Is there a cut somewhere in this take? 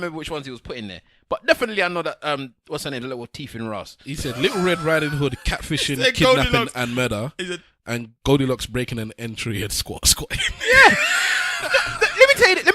no; 0 cuts

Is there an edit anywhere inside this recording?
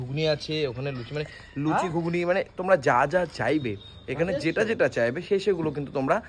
no; 0 cuts

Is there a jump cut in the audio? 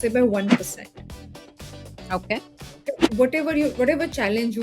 no; 0 cuts

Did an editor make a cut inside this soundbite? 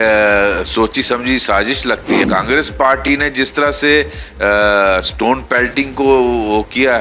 yes; 1 cut; at 2.2 s

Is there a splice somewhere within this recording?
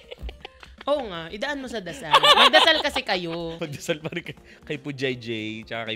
yes; 1 cut; at 3.6 s

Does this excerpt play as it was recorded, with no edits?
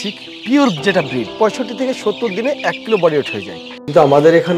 no; 2 cuts; at 1.3 s, 3.3 s

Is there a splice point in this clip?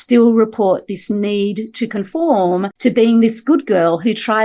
yes; 1 cut; at 2.7 s

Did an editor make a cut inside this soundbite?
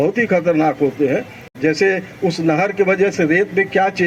no; 0 cuts

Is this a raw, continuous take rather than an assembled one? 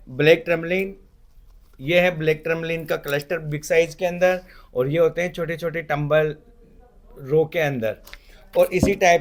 yes; 0 cuts

